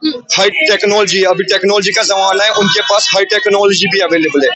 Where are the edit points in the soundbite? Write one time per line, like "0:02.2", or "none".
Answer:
none